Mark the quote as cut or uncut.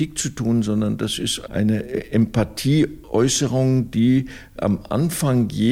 cut